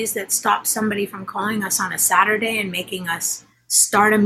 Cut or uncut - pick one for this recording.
uncut